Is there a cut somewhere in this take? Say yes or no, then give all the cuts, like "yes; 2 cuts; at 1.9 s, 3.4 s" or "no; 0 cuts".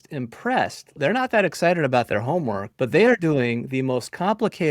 yes; 2 cuts; at 1.0 s, 2.7 s